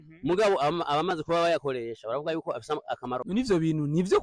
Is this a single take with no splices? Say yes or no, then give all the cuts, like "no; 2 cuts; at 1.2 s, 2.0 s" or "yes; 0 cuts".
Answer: no; 1 cut; at 3.2 s